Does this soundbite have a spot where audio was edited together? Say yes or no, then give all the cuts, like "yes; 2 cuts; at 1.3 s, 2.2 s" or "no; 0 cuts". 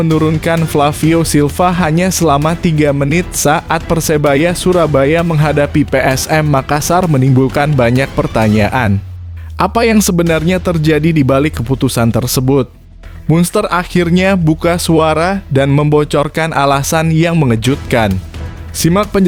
no; 0 cuts